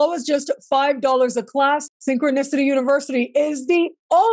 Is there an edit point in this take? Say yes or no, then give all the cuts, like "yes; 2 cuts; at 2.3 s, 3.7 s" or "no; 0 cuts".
yes; 1 cut; at 1.9 s